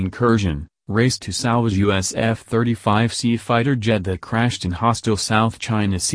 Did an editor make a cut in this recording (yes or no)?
yes